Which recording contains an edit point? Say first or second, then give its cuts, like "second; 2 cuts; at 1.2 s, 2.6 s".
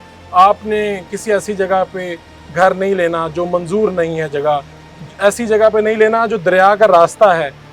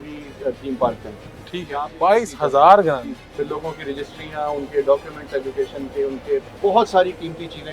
second; 2 cuts; at 3.2 s, 6.5 s